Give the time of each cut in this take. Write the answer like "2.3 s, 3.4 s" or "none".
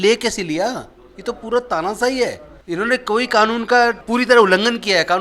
2.5 s, 4.0 s